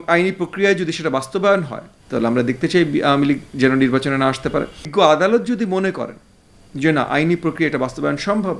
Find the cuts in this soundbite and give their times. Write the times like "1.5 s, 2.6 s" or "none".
4.8 s

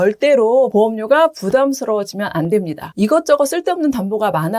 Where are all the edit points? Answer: 2.9 s

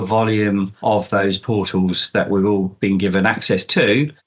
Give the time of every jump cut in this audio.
1.0 s

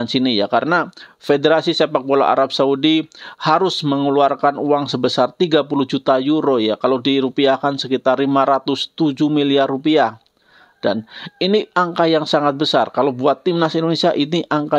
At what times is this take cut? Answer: none

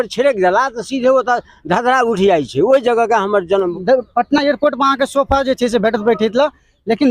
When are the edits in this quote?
3.7 s

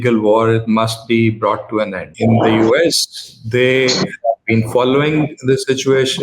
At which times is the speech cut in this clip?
2.1 s

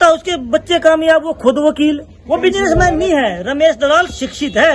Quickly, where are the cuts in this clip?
2.1 s

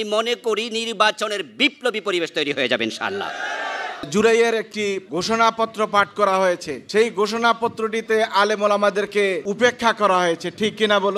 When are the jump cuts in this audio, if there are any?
4.1 s, 5.0 s, 6.7 s, 9.4 s

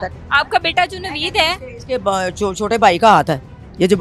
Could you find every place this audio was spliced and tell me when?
none

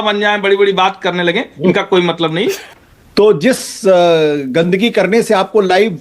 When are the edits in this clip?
2.6 s

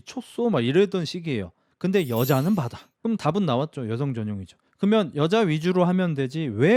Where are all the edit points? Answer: 2.8 s

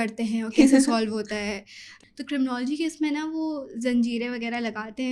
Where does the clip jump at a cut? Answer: 2.0 s

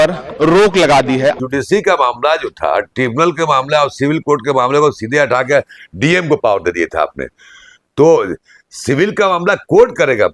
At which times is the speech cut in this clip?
1.4 s

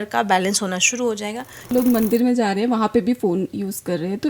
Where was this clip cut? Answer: 1.7 s

